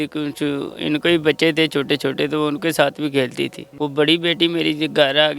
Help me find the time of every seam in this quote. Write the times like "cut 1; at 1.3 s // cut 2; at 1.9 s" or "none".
cut 1; at 3.6 s